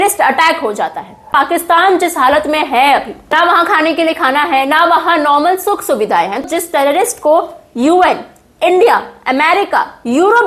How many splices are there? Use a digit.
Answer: 3